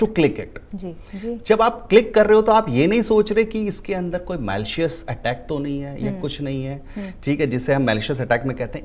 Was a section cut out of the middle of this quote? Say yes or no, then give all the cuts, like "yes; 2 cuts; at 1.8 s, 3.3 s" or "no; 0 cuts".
no; 0 cuts